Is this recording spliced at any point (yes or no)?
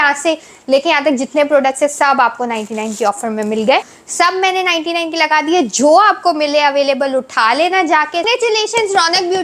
yes